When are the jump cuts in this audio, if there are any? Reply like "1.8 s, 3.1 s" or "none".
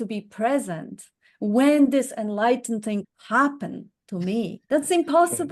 3.2 s, 4.6 s